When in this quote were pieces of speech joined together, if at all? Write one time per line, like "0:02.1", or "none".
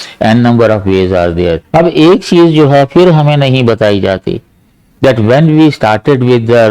0:01.6